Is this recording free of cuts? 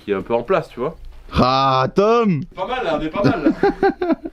yes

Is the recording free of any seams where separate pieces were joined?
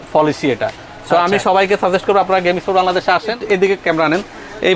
no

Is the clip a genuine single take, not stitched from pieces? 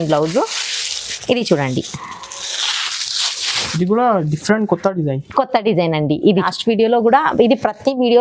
no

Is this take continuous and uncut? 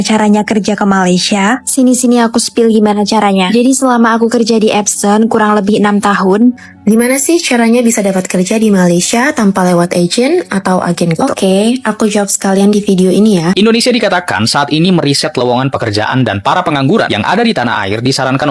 no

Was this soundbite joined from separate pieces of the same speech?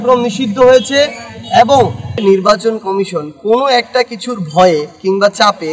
yes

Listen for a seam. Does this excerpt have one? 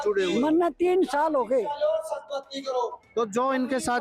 no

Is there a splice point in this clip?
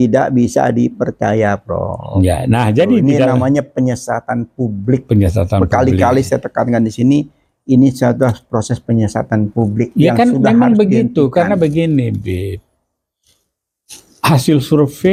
no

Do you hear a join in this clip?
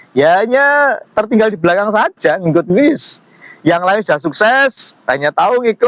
no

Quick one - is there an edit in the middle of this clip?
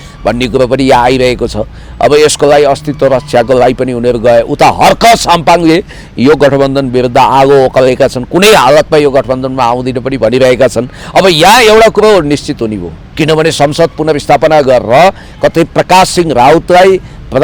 yes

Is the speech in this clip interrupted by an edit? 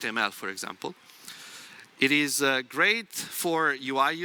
no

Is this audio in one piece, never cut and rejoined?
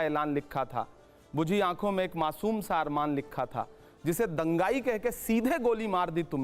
yes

